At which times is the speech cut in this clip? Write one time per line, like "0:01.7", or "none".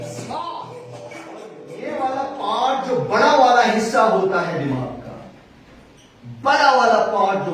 0:01.9

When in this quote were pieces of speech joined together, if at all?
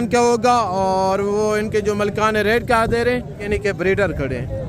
0:03.4

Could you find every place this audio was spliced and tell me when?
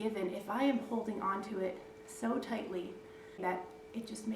0:03.4

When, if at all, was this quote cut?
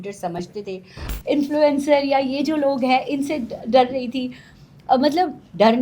0:01.1

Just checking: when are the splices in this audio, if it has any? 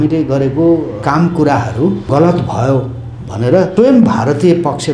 0:00.9
0:02.1
0:03.7

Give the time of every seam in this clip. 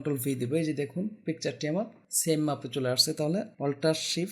0:02.0
0:03.5

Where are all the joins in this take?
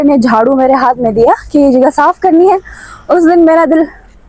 none

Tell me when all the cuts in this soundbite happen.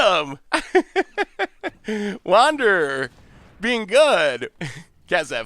0:04.5

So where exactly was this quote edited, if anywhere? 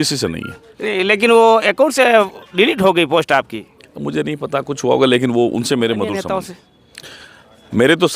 0:06.2

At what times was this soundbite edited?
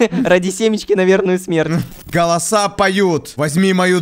0:02.1

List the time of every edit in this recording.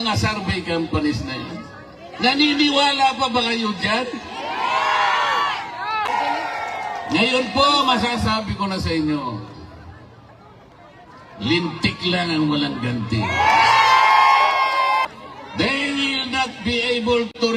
0:06.1
0:15.1

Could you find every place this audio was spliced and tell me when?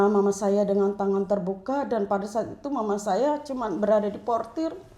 none

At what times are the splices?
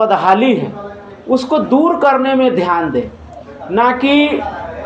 none

